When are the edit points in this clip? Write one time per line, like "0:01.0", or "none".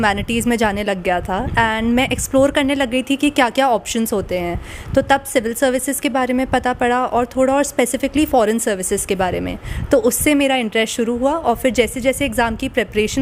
none